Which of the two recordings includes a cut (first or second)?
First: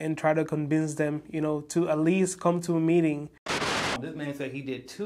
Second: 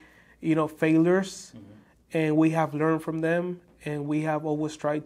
first